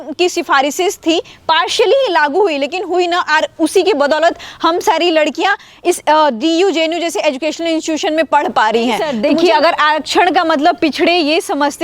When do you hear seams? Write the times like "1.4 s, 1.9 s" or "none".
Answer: 9.1 s